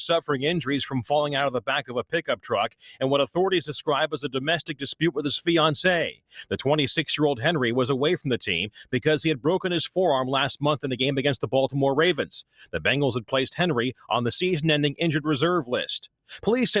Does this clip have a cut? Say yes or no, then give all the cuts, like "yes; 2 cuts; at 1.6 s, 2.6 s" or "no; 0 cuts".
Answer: no; 0 cuts